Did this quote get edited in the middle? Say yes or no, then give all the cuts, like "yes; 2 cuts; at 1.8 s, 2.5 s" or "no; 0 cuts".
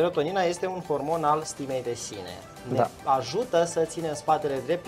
no; 0 cuts